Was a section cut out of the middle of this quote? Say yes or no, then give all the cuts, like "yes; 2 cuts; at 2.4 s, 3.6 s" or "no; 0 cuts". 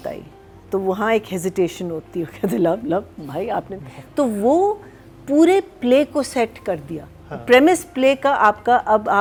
no; 0 cuts